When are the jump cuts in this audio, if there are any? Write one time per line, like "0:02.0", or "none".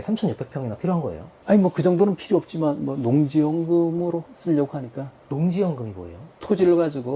0:01.3
0:04.3
0:06.3